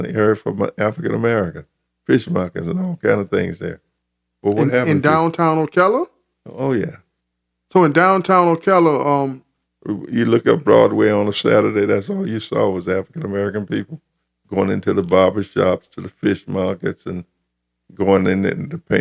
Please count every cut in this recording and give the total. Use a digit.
0